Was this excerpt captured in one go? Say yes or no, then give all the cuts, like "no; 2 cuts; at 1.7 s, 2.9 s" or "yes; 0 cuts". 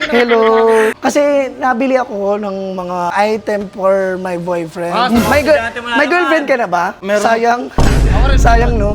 no; 3 cuts; at 1.0 s, 3.1 s, 7.0 s